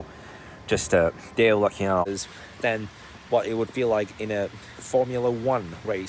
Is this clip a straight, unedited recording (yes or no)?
no